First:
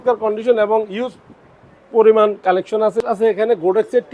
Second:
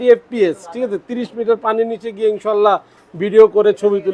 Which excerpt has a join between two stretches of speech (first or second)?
first